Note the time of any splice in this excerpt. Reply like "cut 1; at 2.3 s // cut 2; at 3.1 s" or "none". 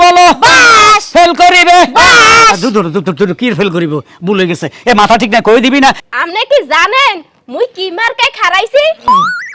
cut 1; at 6.0 s